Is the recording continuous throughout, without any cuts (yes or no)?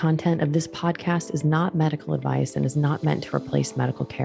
yes